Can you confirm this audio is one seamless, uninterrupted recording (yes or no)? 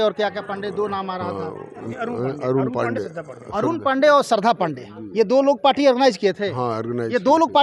no